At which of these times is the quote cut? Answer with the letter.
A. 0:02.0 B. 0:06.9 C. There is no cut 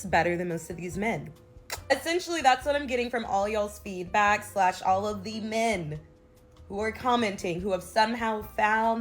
A